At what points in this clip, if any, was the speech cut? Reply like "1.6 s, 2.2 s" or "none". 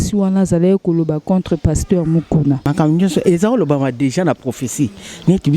2.7 s